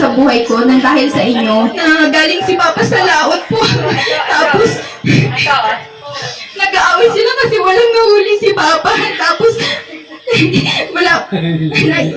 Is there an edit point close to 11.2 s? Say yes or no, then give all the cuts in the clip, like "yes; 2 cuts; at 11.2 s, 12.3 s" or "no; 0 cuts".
no; 1 cut; at 1.8 s